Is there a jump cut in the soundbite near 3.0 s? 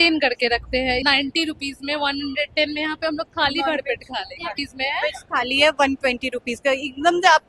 no; 2 cuts; at 1.0 s, 4.6 s

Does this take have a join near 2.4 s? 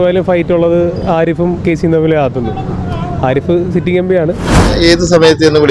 no; 1 cut; at 4.6 s

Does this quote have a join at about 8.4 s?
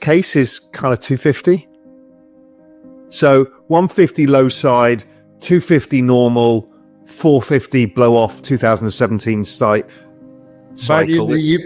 no; 0 cuts

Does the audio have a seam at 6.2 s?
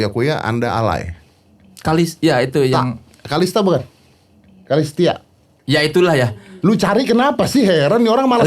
no; 1 cut; at 1.5 s

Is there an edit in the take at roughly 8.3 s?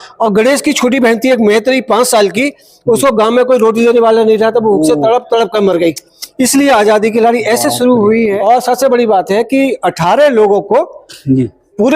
yes; 1 cut; at 8.3 s

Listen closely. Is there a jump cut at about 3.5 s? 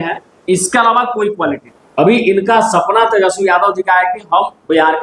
no; 1 cut; at 1.7 s

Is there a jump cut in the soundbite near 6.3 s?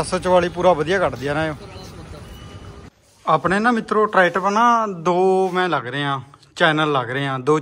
no; 1 cut; at 2.8 s

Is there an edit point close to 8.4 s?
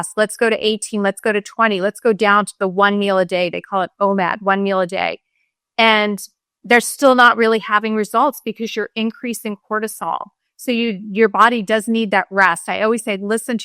no; 0 cuts

